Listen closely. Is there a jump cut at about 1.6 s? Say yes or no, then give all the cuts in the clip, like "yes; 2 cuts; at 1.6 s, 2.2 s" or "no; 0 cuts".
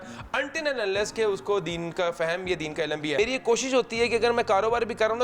no; 1 cut; at 3.2 s